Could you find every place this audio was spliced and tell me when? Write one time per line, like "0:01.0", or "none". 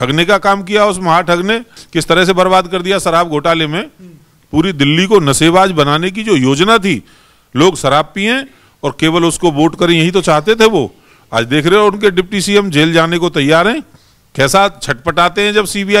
0:01.8